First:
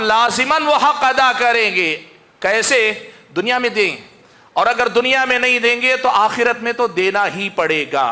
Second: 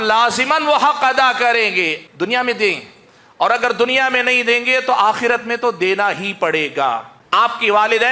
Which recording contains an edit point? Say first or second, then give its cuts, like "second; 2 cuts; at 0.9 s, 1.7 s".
second; 2 cuts; at 2.0 s, 7.1 s